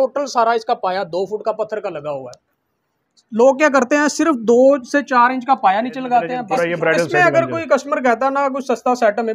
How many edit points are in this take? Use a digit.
1